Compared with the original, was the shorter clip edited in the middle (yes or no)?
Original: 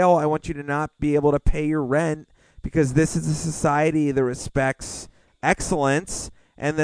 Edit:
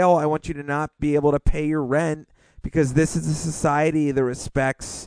no